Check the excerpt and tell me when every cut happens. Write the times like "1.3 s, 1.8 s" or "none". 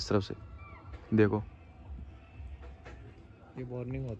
none